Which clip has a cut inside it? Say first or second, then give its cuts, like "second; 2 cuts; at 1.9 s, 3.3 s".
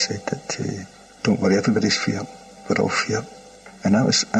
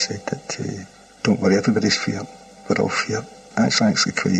second; 1 cut; at 3.5 s